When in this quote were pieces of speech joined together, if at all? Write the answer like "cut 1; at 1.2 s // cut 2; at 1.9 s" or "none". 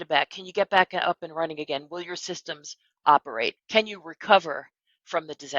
cut 1; at 3.5 s